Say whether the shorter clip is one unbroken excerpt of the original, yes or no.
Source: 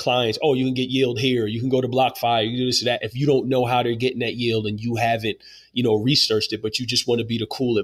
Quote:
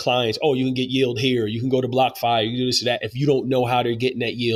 yes